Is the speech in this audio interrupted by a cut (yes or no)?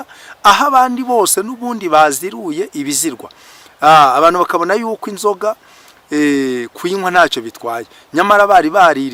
no